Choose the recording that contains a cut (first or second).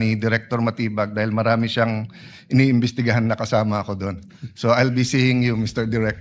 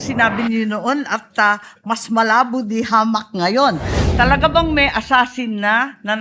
second